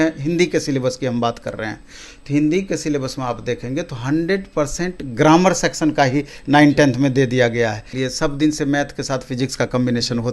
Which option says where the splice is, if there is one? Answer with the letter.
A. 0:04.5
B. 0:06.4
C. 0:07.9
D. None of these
C